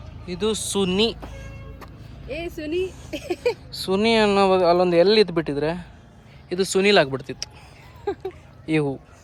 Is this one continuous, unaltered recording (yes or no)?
yes